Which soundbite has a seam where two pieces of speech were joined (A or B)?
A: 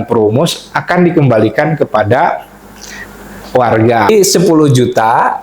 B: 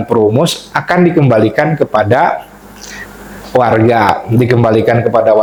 A